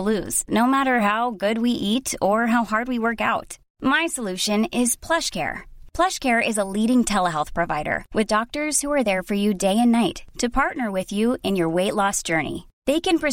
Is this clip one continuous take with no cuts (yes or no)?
yes